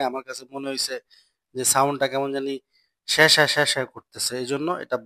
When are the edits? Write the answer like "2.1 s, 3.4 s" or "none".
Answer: none